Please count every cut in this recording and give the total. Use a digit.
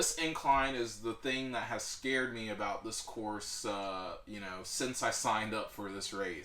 0